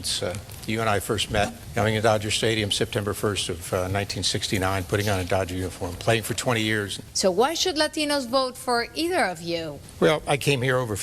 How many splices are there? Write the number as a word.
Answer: three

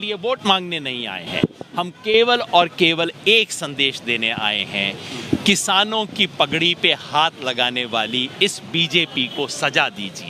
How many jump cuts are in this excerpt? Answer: zero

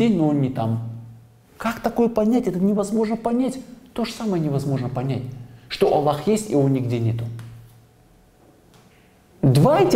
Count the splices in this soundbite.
zero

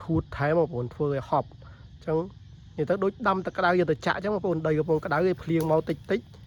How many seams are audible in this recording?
zero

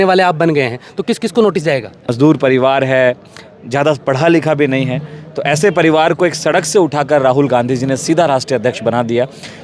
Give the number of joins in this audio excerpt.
one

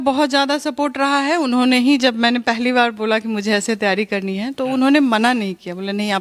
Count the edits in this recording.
zero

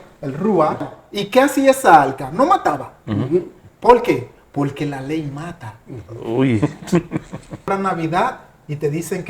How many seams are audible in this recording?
two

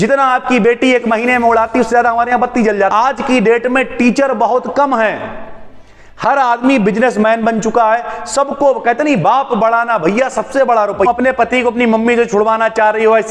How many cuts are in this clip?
two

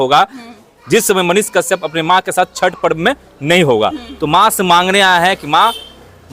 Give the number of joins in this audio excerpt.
zero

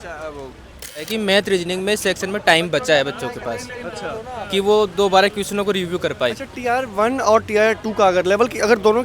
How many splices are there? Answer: one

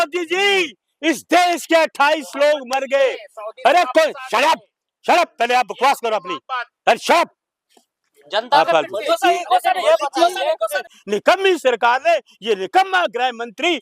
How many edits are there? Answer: one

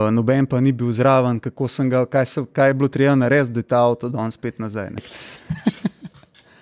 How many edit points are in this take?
one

